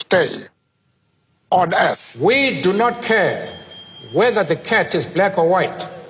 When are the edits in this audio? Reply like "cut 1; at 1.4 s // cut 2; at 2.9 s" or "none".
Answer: cut 1; at 2.1 s